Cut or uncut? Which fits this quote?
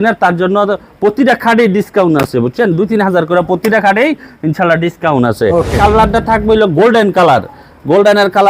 cut